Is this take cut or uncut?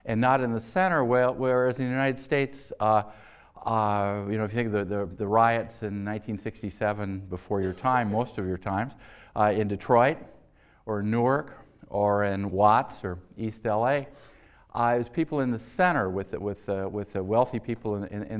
uncut